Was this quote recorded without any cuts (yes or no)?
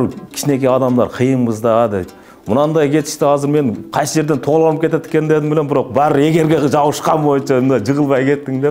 yes